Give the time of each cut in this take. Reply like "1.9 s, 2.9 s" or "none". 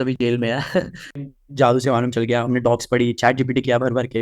1.2 s